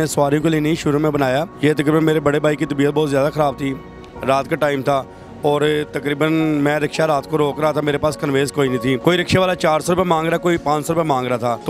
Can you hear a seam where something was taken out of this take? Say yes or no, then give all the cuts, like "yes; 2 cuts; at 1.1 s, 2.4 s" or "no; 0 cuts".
no; 0 cuts